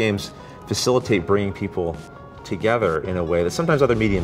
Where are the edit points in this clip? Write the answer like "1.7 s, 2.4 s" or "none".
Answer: none

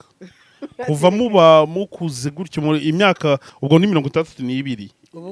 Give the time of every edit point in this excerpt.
3.5 s

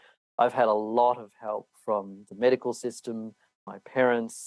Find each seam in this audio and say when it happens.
none

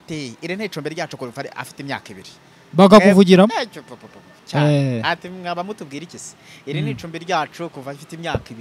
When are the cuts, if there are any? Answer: none

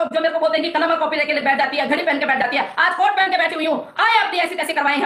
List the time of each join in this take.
none

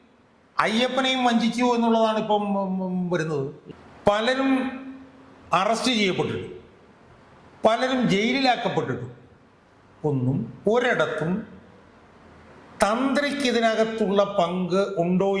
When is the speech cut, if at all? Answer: 3.6 s

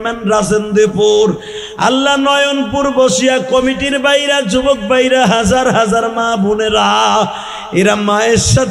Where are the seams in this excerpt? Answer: none

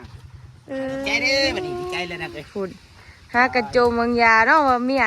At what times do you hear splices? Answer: 1.2 s

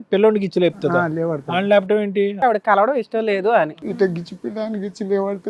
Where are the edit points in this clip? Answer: 2.4 s, 3.7 s

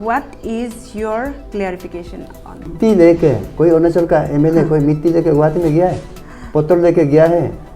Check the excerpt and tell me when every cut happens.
2.7 s

